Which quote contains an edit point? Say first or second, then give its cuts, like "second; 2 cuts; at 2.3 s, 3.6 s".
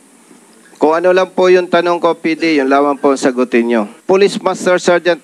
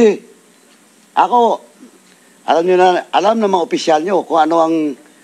first; 1 cut; at 3.9 s